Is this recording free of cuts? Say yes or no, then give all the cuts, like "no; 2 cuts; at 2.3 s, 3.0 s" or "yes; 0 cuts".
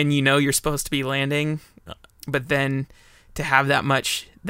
no; 1 cut; at 2.0 s